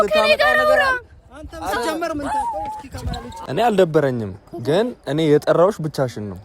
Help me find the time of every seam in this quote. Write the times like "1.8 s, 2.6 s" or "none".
3.3 s